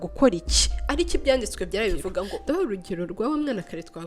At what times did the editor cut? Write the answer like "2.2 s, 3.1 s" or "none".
2.4 s